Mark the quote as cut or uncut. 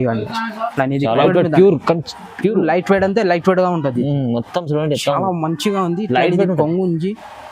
cut